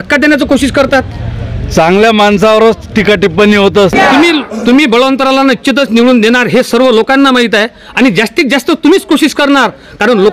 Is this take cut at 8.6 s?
no; 1 cut; at 3.9 s

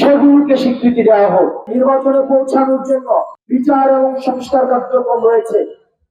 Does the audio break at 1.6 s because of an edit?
yes; 2 cuts; at 1.6 s, 3.4 s

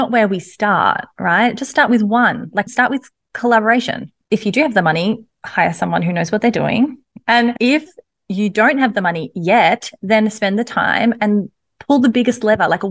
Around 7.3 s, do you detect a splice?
yes; 2 cuts; at 4.2 s, 7.3 s

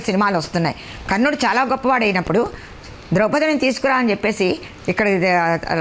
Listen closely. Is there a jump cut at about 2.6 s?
no; 0 cuts

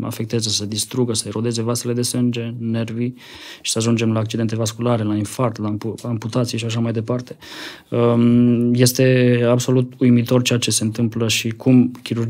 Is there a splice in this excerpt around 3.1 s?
no; 0 cuts

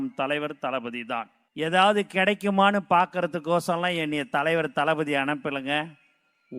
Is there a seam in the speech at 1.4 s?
yes; 1 cut; at 1.4 s

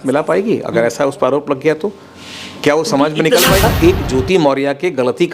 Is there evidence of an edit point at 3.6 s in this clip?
yes; 1 cut; at 3.6 s

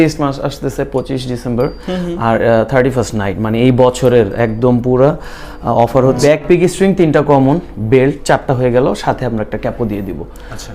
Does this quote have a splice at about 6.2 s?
yes; 1 cut; at 6.2 s

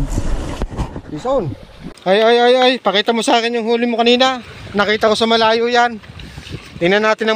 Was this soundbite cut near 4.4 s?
no; 1 cut; at 1.9 s

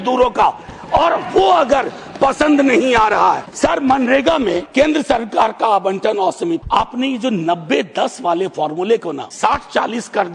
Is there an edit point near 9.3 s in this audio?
yes; 4 cuts; at 3.5 s, 4.6 s, 6.6 s, 9.3 s

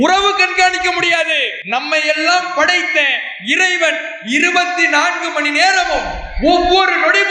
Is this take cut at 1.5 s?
yes; 1 cut; at 1.5 s

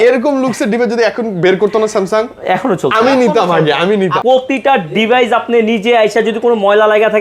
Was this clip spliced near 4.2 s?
yes; 1 cut; at 4.2 s

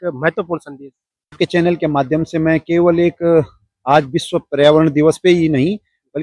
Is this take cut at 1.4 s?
yes; 1 cut; at 1.4 s

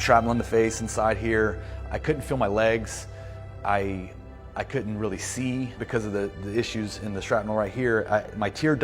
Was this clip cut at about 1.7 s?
yes; 2 cuts; at 1.7 s, 5.8 s

